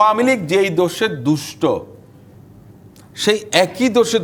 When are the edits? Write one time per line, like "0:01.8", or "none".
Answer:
none